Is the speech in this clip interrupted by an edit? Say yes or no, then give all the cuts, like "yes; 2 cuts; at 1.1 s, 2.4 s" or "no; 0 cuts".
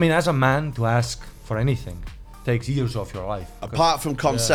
no; 0 cuts